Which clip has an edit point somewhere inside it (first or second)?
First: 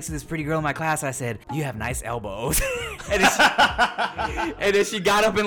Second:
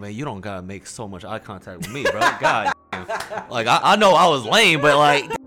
first